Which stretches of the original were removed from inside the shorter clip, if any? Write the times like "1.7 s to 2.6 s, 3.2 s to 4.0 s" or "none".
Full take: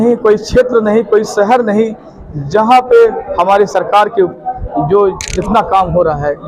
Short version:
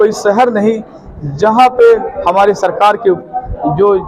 none